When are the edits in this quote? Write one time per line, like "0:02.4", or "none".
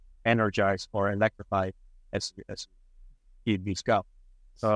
none